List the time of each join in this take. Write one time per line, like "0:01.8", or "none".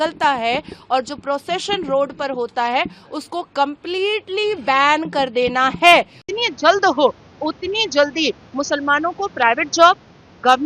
0:06.2